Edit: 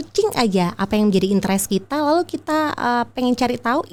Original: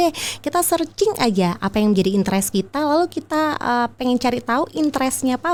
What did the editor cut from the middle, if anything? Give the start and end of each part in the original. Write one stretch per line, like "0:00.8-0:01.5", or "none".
none